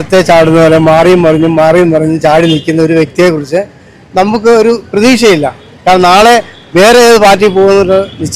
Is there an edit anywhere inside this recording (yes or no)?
no